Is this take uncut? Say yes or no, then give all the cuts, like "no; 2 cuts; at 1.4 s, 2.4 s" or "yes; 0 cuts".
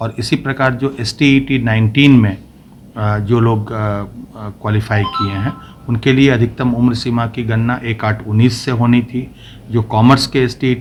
yes; 0 cuts